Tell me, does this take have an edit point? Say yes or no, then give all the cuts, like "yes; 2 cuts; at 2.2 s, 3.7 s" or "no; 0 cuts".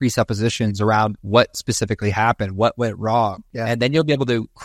yes; 2 cuts; at 1.2 s, 3.5 s